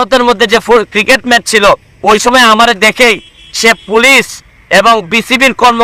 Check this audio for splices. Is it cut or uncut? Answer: uncut